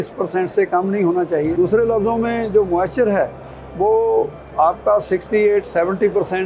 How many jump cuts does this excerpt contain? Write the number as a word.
one